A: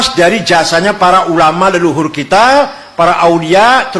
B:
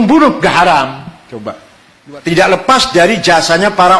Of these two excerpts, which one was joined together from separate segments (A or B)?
B